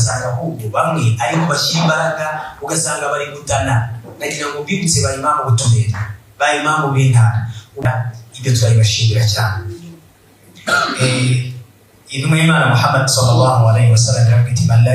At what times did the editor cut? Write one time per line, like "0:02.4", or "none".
0:07.8